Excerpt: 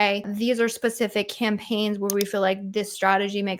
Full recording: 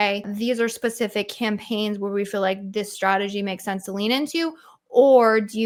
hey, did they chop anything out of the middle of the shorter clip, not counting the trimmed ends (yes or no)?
no